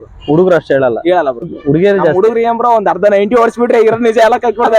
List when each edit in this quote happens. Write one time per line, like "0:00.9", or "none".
0:01.5

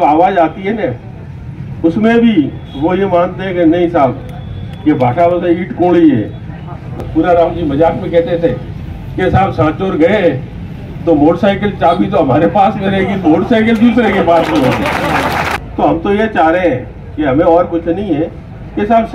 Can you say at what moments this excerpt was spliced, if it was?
0:07.0
0:15.6

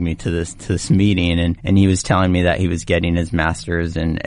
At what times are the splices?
0:01.6

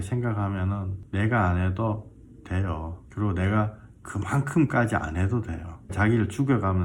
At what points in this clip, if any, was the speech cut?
0:01.0
0:03.0
0:05.9

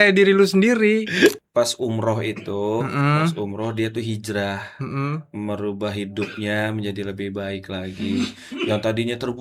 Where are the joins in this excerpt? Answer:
0:01.4

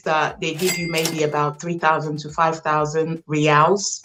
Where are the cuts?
none

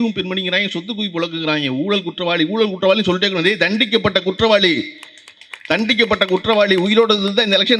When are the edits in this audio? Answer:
none

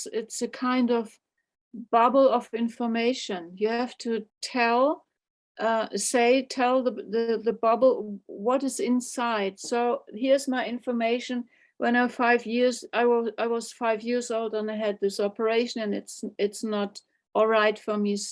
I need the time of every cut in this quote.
0:04.3

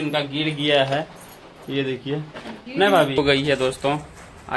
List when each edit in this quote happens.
0:03.2

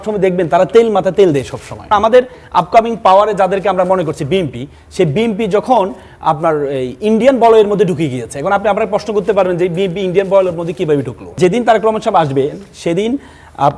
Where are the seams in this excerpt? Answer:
0:01.9
0:11.3

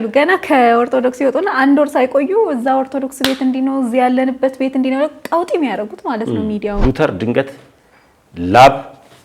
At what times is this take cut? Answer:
0:06.8

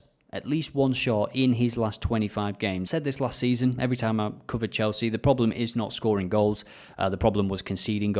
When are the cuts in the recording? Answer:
0:02.8

